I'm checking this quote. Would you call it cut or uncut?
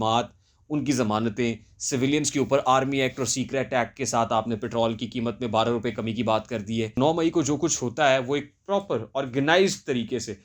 cut